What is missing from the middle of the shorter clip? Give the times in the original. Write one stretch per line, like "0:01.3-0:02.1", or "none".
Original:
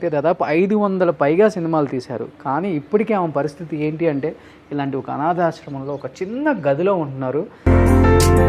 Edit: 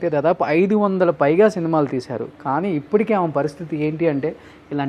none

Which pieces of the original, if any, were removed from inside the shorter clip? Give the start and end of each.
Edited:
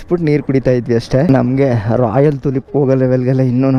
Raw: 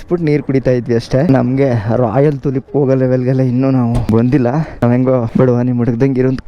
none

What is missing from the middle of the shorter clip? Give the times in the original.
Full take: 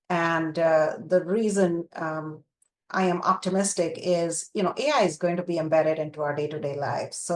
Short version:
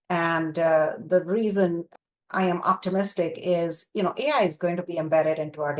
0:01.9-0:02.5

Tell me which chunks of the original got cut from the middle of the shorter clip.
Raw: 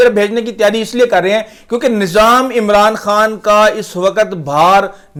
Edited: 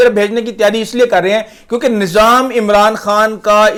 none

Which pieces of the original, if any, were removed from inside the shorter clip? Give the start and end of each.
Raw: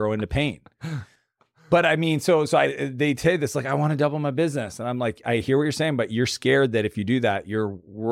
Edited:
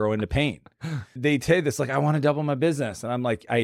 0:01.1-0:02.9

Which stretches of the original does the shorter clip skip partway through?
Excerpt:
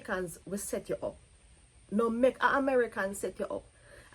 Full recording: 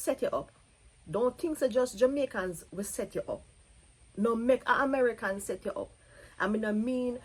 none

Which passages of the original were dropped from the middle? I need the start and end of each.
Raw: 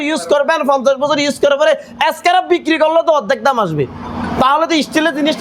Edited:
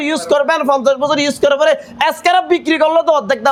none

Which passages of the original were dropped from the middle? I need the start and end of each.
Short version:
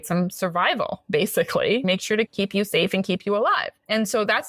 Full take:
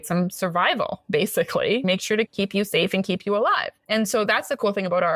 none

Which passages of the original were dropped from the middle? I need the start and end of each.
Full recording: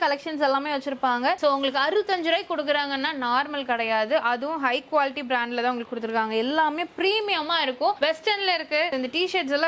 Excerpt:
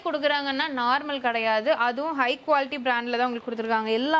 none

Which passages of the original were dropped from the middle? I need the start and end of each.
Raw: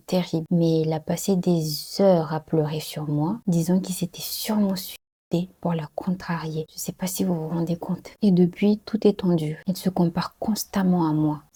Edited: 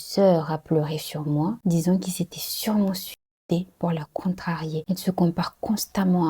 0:06.6-0:09.6

